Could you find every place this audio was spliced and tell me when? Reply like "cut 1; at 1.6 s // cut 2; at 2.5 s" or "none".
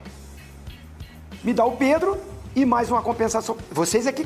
none